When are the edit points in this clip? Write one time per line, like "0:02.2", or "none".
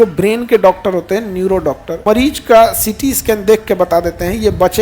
0:02.0